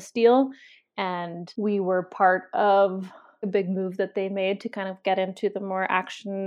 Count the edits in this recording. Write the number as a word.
two